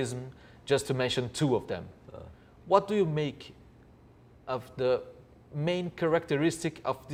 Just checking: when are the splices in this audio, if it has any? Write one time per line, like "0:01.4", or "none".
none